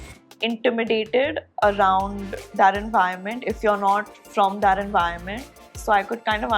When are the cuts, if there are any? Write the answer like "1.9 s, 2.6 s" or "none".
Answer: none